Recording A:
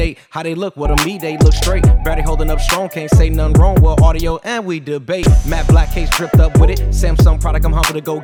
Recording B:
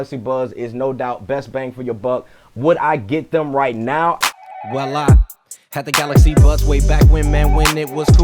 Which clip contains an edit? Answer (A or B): B